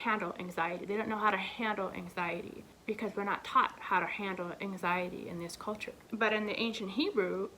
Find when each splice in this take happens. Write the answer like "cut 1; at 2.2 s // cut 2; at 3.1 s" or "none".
cut 1; at 2.7 s